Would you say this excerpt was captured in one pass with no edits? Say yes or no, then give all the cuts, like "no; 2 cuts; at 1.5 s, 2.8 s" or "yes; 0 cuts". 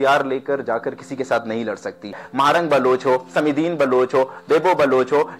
no; 1 cut; at 2.2 s